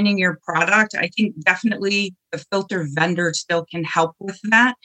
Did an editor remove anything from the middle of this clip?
no; 0 cuts

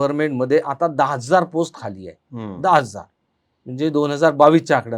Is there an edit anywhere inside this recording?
no; 0 cuts

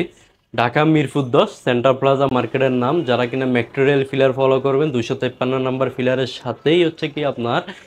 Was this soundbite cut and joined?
no; 0 cuts

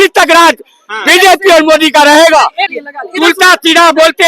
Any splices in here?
yes; 1 cut; at 2.6 s

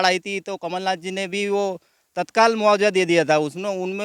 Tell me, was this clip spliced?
no; 0 cuts

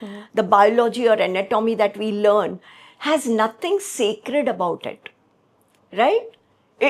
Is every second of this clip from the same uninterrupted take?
yes; 0 cuts

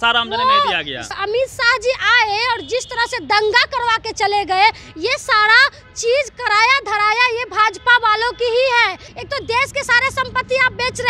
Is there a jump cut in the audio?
yes; 2 cuts; at 1.1 s, 9.0 s

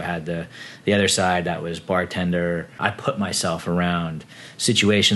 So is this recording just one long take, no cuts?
no; 1 cut; at 2.7 s

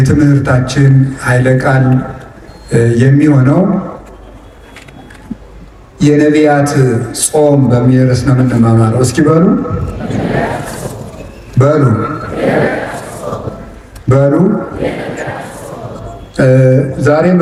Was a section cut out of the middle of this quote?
no; 0 cuts

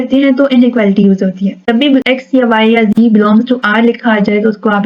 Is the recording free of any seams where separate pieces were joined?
no; 1 cut; at 1.8 s

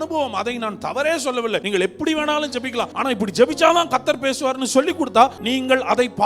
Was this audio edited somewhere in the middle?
yes; 3 cuts; at 1.6 s, 2.9 s, 5.4 s

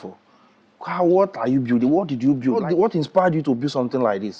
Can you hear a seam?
yes; 1 cut; at 2.6 s

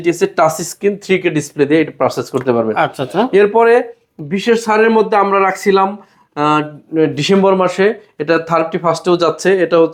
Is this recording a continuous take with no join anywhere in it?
yes; 0 cuts

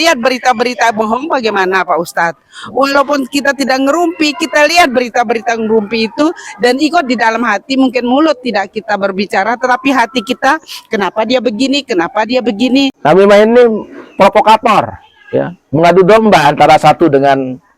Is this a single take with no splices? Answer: no; 1 cut; at 13.0 s

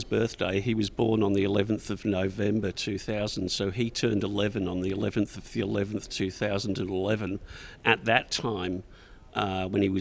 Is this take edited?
no; 0 cuts

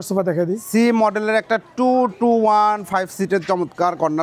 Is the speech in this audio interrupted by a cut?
no; 0 cuts

